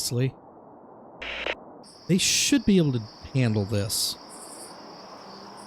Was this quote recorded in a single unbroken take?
no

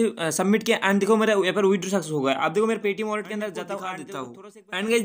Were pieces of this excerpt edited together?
yes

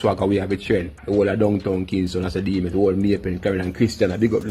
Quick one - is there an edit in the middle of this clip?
no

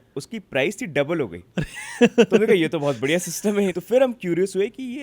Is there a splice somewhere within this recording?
yes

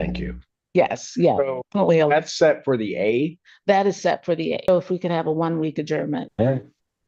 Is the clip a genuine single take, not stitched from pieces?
no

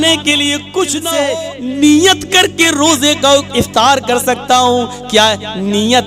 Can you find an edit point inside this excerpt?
yes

